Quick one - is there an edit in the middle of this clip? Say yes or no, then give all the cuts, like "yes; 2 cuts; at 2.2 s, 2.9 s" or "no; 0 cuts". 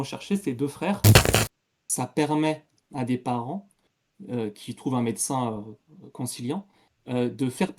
yes; 1 cut; at 1.2 s